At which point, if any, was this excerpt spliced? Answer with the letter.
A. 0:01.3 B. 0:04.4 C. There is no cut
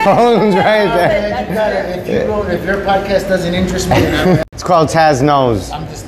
B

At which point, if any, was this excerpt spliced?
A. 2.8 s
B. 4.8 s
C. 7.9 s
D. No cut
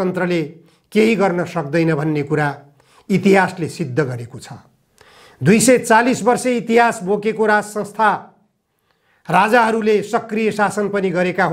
D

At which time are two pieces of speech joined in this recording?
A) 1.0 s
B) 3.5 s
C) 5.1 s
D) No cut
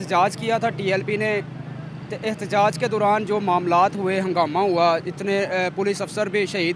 D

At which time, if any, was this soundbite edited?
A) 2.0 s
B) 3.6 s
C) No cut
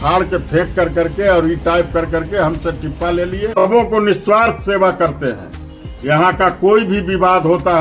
B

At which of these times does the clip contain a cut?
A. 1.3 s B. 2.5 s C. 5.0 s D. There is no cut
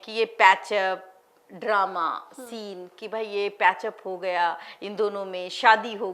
D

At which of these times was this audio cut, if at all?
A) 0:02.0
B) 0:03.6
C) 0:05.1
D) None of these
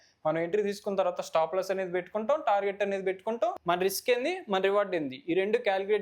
B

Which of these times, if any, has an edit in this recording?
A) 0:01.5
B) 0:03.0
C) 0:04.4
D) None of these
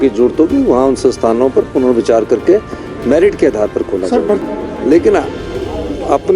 C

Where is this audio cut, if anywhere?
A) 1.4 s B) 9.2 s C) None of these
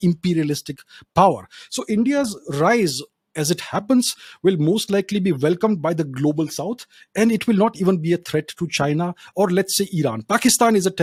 C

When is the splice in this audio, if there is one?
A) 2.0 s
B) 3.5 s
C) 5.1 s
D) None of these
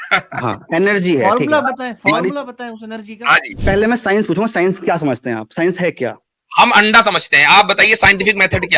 B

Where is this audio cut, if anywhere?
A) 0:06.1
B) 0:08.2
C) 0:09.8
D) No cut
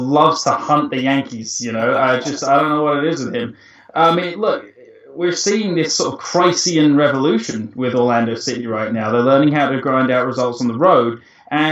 D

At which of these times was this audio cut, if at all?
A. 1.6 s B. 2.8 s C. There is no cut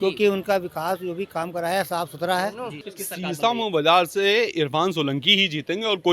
B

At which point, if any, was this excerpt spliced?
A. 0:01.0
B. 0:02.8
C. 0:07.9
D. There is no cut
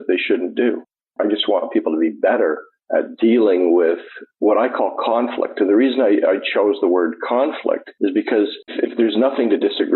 A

